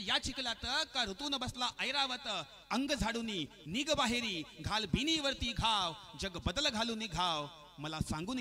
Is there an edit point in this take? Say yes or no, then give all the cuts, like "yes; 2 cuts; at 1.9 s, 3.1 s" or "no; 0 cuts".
no; 0 cuts